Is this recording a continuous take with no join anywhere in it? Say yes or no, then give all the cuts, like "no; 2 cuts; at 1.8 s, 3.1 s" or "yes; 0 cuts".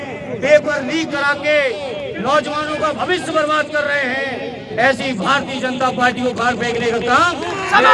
yes; 0 cuts